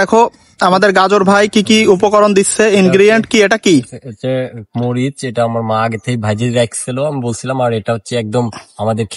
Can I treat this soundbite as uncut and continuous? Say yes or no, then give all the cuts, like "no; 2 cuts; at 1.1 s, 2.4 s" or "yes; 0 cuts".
yes; 0 cuts